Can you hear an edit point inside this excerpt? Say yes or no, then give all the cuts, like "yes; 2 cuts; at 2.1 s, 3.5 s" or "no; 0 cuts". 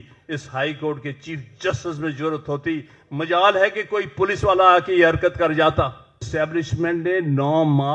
yes; 1 cut; at 6.3 s